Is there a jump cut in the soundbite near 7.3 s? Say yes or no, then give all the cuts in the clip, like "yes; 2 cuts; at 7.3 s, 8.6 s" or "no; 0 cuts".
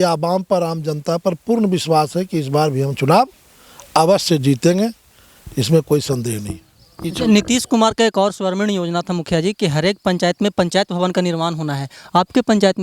yes; 1 cut; at 7.3 s